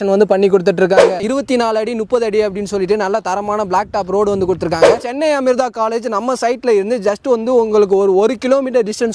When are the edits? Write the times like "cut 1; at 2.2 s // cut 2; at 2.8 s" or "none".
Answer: cut 1; at 1.2 s // cut 2; at 5.0 s